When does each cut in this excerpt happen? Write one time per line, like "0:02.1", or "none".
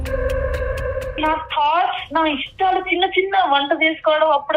0:01.1